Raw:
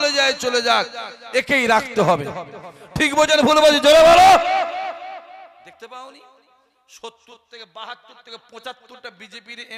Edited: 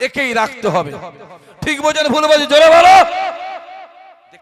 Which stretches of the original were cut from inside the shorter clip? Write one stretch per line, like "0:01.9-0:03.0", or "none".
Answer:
none